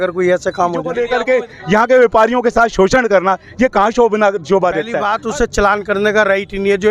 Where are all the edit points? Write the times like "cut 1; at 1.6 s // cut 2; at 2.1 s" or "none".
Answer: cut 1; at 1.0 s // cut 2; at 5.0 s